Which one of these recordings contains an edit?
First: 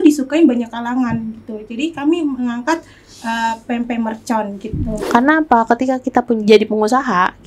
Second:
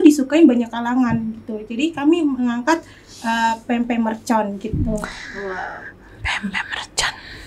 first; 1 cut; at 4.9 s

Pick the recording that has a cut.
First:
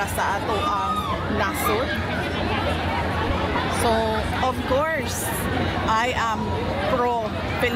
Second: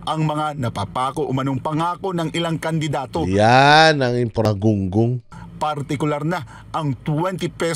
second; 1 cut; at 4.5 s

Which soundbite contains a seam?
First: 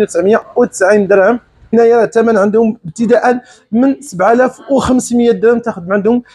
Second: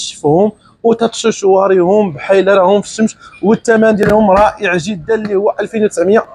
first; 1 cut; at 1.7 s

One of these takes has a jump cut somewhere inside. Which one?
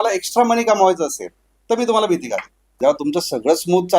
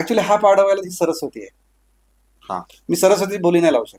first; 1 cut; at 2.7 s

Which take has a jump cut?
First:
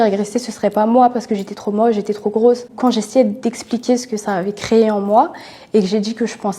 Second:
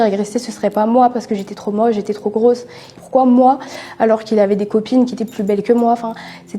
first; 1 cut; at 2.7 s

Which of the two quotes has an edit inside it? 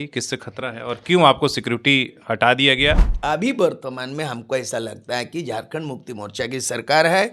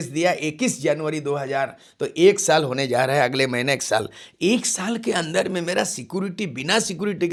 first; 1 cut; at 3.1 s

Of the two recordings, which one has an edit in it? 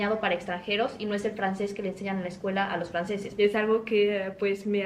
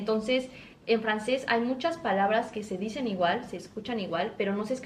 first; 1 cut; at 3.3 s

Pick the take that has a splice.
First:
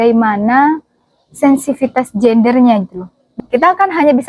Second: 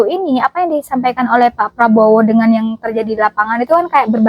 first; 1 cut; at 3.2 s

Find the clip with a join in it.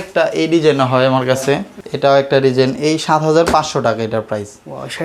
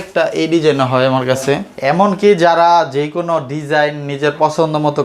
second; 1 cut; at 1.7 s

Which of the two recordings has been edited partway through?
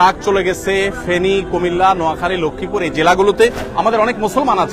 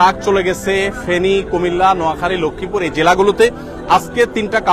first; 1 cut; at 3.6 s

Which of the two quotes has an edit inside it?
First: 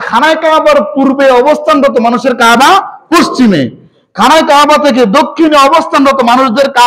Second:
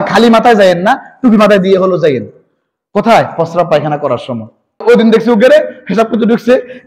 second; 1 cut; at 4.8 s

